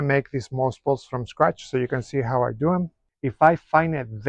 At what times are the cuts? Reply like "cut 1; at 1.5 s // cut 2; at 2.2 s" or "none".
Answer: cut 1; at 3.1 s